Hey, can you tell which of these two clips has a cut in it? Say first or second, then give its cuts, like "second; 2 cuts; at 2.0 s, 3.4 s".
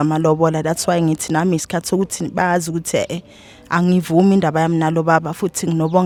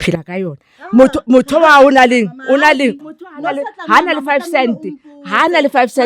second; 1 cut; at 3.0 s